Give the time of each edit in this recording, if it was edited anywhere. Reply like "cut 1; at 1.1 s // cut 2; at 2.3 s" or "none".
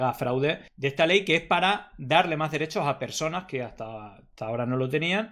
none